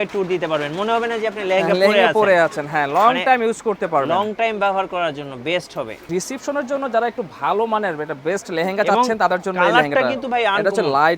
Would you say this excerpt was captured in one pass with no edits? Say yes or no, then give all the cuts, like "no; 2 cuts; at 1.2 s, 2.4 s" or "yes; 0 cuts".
no; 1 cut; at 6.1 s